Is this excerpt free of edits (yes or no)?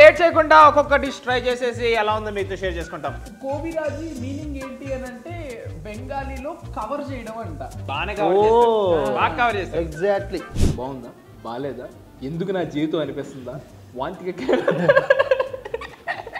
no